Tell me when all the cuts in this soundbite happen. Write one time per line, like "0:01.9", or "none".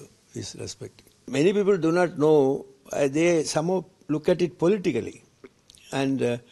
0:01.3